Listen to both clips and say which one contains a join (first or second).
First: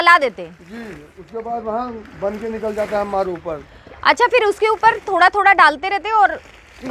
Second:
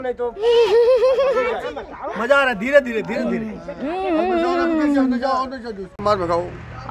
second